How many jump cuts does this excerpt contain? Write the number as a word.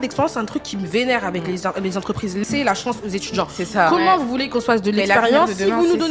one